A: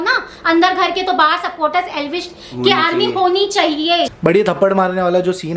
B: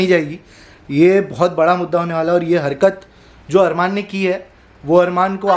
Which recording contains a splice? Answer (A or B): A